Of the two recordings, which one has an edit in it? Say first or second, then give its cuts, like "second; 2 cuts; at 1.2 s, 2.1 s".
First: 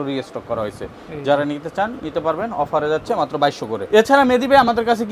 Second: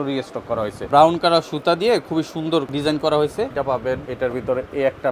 second; 3 cuts; at 0.9 s, 2.7 s, 3.9 s